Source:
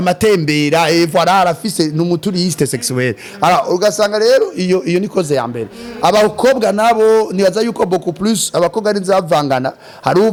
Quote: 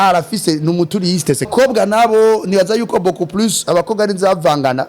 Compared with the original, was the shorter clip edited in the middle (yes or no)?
yes